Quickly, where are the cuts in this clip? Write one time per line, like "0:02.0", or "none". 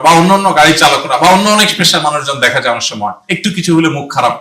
0:03.5